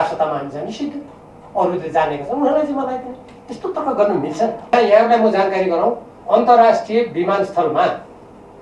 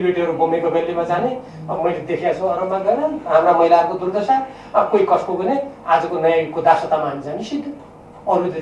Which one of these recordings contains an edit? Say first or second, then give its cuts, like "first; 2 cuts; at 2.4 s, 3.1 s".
first; 1 cut; at 4.7 s